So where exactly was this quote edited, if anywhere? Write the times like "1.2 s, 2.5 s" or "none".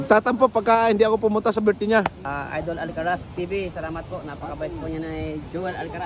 2.2 s